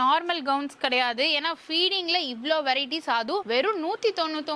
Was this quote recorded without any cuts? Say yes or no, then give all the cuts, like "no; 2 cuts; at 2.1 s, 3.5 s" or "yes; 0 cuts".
yes; 0 cuts